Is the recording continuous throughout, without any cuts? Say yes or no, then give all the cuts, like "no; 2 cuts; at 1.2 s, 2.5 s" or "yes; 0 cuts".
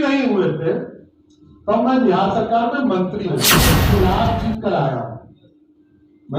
no; 1 cut; at 3.7 s